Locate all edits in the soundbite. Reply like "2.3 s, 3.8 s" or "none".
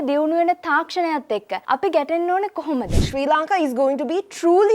1.6 s, 3.1 s